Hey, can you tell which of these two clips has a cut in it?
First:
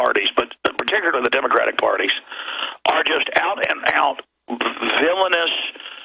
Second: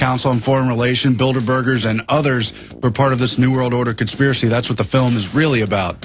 second; 1 cut; at 4.5 s

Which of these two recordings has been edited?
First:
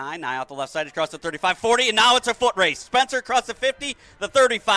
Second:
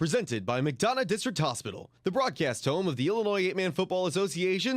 second; 1 cut; at 2.6 s

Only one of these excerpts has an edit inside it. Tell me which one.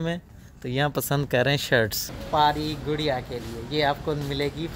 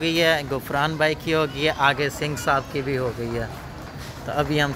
first; 1 cut; at 2.1 s

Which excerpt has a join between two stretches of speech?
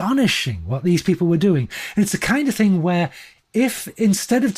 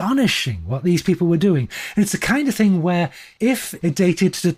second; 1 cut; at 3.3 s

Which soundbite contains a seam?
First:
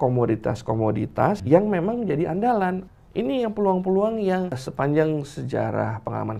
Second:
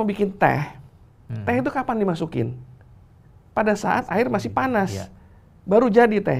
first; 3 cuts; at 1.4 s, 2.9 s, 4.6 s

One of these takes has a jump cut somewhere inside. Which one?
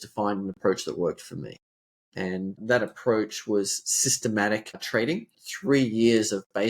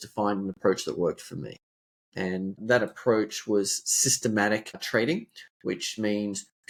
first; 1 cut; at 5.4 s

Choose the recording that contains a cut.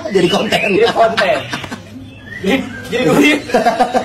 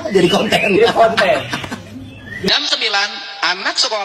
second; 1 cut; at 2.5 s

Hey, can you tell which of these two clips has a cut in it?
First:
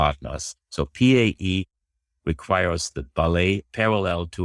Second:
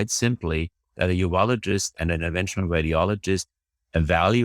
second; 1 cut; at 2.0 s

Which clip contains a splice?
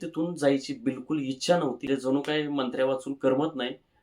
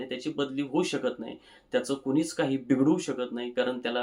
first; 1 cut; at 1.9 s

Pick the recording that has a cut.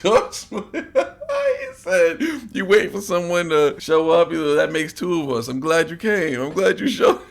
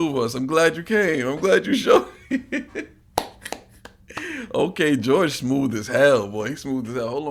first; 1 cut; at 3.8 s

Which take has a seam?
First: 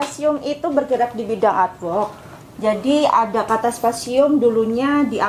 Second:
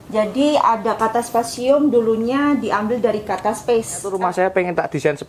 second; 1 cut; at 4.1 s

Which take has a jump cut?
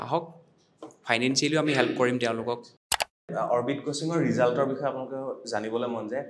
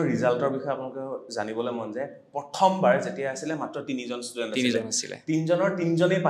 first; 1 cut; at 3.2 s

